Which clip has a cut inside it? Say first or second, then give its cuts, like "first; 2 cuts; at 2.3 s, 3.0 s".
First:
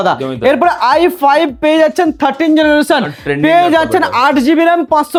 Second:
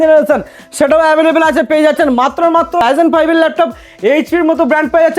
second; 1 cut; at 2.8 s